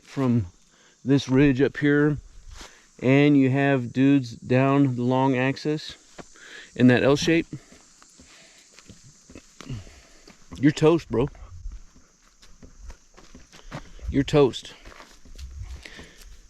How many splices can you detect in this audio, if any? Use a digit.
0